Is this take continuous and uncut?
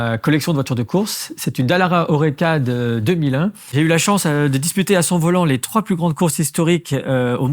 no; 1 cut; at 3.7 s

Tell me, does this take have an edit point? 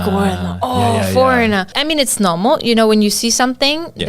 yes; 1 cut; at 1.7 s

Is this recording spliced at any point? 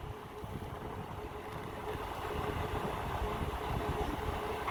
no; 0 cuts

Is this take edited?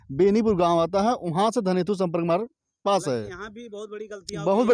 no; 0 cuts

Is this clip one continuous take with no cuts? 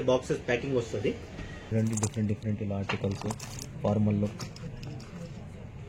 no; 1 cut; at 1.7 s

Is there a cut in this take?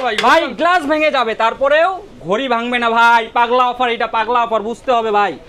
no; 0 cuts

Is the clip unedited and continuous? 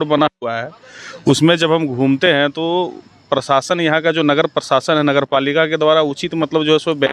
yes; 0 cuts

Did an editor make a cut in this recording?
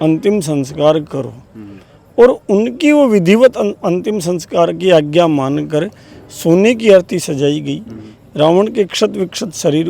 no; 0 cuts

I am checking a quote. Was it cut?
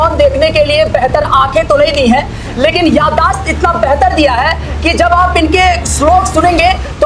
no; 0 cuts

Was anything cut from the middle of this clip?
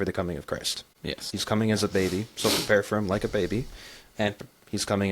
yes; 1 cut; at 1.4 s

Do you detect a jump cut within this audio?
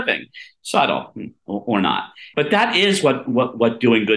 yes; 1 cut; at 2.3 s

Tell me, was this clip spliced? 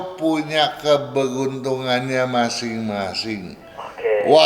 no; 0 cuts

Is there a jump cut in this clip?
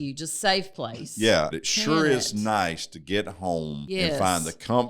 yes; 2 cuts; at 1.6 s, 3.8 s

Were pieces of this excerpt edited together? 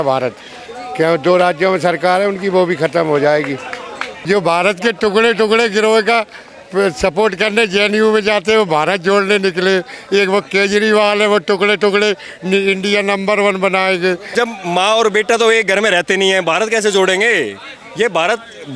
yes; 2 cuts; at 4.1 s, 14.3 s

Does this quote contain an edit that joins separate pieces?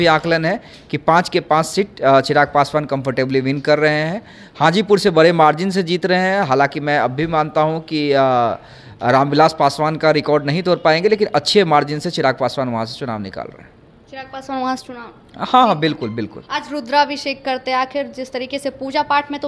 no; 0 cuts

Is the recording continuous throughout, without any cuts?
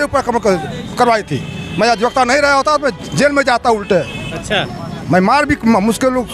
yes; 0 cuts

